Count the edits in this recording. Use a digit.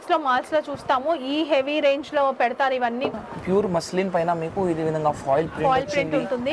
1